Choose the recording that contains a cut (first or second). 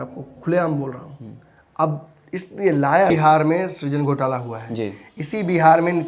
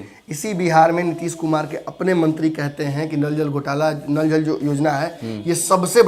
first